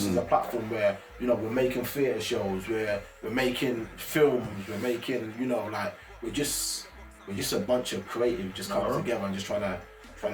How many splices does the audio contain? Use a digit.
0